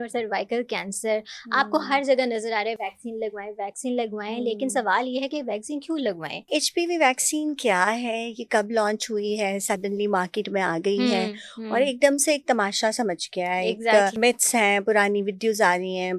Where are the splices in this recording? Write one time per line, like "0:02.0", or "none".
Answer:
0:06.5
0:14.1